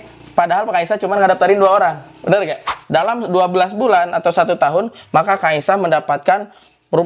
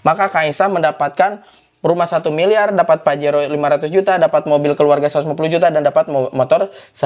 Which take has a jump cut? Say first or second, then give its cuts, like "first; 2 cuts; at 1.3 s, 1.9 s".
first; 1 cut; at 2.7 s